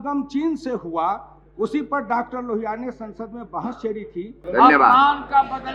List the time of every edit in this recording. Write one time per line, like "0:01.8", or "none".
0:04.4